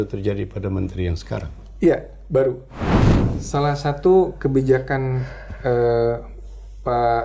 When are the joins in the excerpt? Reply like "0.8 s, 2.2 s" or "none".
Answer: 3.1 s